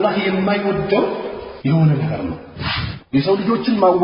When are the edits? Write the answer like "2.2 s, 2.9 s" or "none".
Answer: 1.4 s, 2.7 s